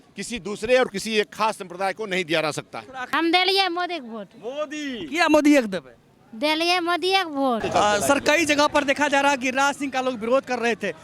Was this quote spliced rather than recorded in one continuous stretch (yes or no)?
yes